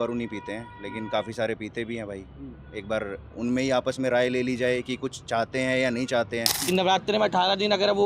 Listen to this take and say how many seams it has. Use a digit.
1